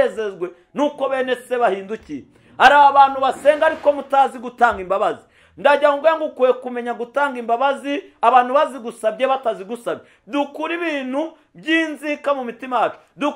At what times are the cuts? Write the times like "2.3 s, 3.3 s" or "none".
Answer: none

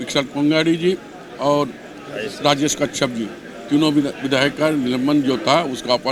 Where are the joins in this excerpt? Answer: none

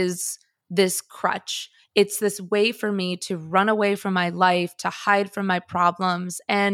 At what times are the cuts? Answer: 2.2 s

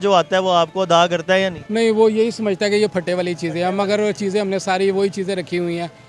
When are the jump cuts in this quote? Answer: 1.6 s

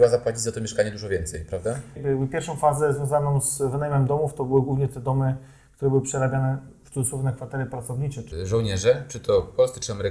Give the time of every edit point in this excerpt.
2.0 s, 8.3 s

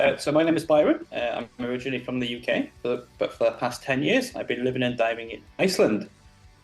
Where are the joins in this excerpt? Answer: 1.1 s

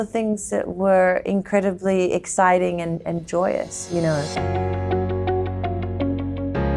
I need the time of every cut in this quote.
4.3 s

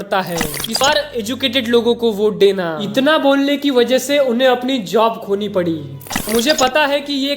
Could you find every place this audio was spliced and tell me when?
0.8 s, 6.1 s

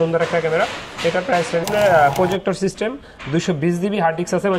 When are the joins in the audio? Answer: 1.7 s

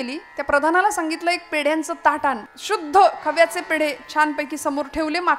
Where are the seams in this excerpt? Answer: 2.5 s

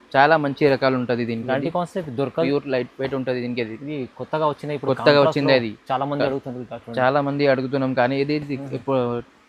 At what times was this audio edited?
2.5 s

